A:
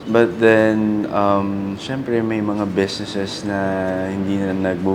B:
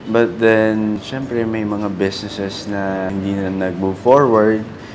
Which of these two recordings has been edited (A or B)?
B